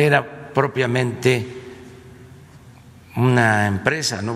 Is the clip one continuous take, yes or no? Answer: yes